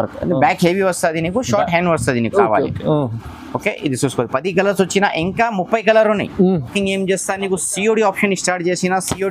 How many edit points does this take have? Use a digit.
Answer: 1